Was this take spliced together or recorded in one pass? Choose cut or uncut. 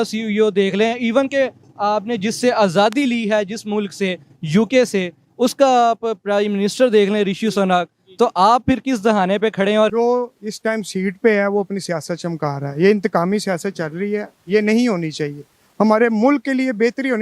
cut